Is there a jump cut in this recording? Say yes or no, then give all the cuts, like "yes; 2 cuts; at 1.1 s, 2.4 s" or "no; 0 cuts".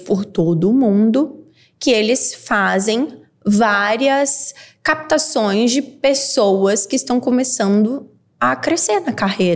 no; 0 cuts